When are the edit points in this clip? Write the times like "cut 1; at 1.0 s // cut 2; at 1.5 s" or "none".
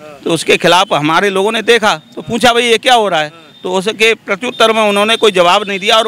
none

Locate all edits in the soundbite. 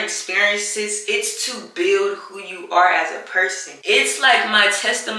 cut 1; at 1.0 s // cut 2; at 3.8 s

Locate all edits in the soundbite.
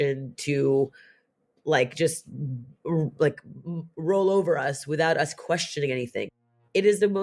cut 1; at 6.3 s

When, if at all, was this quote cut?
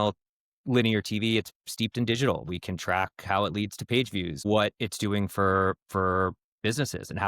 cut 1; at 4.4 s

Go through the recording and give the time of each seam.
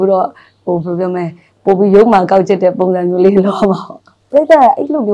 cut 1; at 4.2 s

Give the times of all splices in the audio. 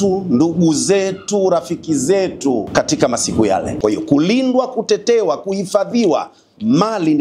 cut 1; at 2.7 s // cut 2; at 3.7 s

